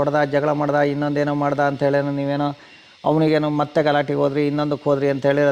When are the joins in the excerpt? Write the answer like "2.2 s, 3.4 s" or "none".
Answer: none

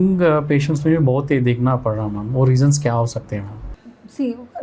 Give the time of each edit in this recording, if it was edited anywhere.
none

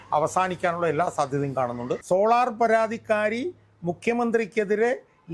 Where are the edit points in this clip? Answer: 1.9 s

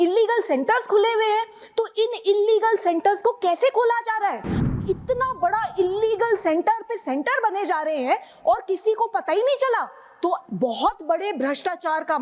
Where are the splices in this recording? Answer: 4.7 s

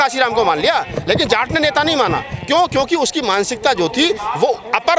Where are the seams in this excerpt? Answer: none

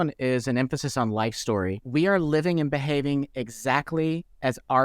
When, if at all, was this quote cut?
1.8 s

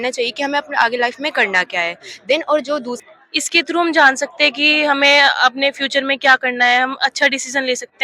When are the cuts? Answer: 2.9 s

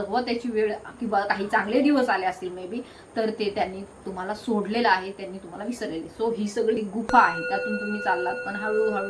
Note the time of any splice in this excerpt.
6.8 s

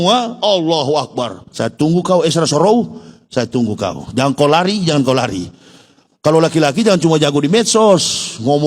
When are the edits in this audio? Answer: 1.4 s

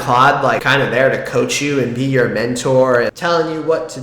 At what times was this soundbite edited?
3.1 s

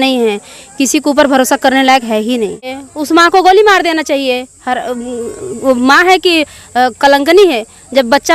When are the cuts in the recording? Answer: 2.5 s

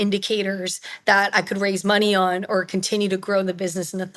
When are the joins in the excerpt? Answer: none

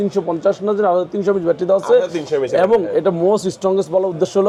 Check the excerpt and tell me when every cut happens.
none

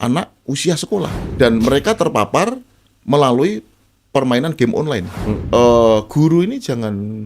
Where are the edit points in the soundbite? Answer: 1.2 s, 5.4 s

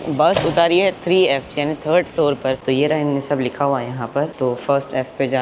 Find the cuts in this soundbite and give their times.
2.6 s

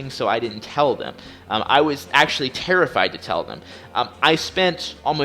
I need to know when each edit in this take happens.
none

